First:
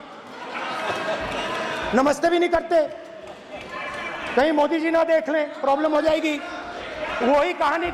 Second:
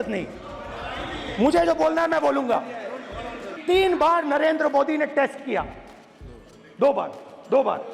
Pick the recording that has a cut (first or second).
second